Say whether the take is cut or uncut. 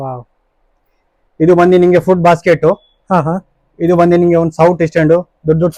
uncut